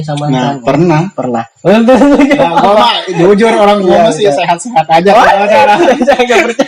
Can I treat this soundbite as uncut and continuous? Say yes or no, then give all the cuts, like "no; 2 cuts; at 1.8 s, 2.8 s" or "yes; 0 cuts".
yes; 0 cuts